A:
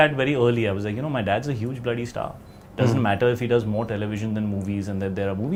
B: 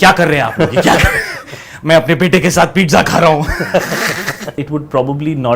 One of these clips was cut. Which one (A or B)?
B